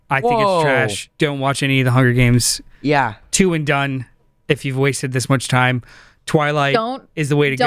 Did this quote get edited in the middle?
yes; 1 cut; at 1.0 s

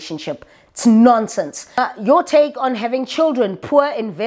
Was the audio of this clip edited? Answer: yes; 1 cut; at 1.8 s

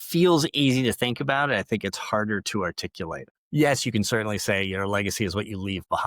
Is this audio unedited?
no; 1 cut; at 3.3 s

